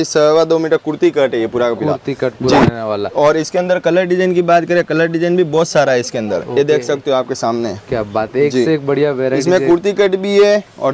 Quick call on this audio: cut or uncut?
uncut